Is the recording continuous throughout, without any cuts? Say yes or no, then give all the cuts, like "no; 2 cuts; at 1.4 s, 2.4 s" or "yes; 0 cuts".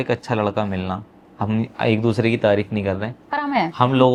yes; 0 cuts